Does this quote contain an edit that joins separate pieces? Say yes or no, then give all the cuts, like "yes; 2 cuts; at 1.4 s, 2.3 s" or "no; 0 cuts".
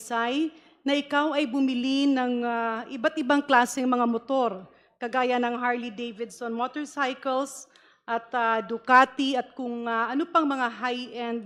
no; 0 cuts